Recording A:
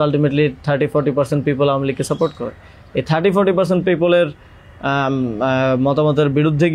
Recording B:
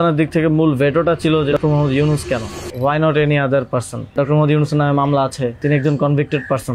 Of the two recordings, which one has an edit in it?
B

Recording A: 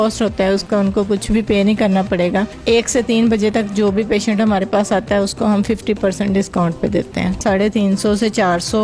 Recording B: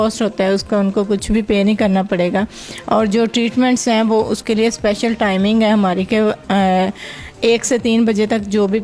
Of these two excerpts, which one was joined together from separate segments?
A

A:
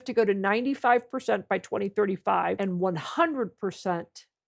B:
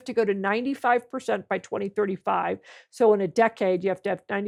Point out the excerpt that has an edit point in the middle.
A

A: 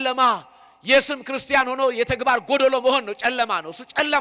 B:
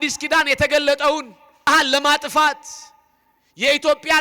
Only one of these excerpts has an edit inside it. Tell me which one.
B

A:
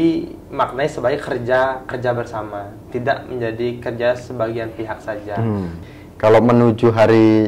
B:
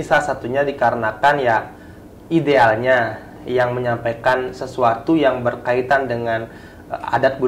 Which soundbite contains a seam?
A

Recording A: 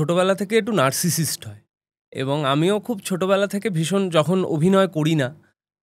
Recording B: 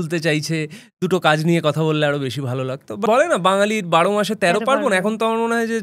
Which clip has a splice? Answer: B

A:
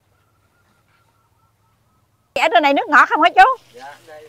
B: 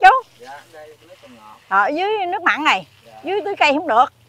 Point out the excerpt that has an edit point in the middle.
A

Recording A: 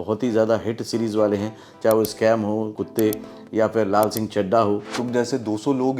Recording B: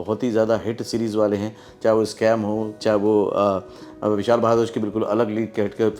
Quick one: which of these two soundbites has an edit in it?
A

